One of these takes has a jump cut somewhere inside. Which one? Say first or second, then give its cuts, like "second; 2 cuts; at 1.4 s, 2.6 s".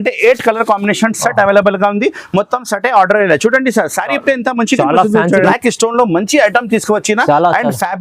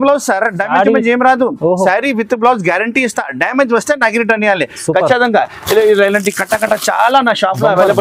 first; 1 cut; at 5.5 s